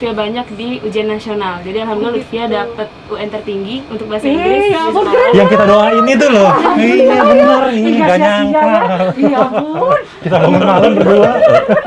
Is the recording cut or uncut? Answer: uncut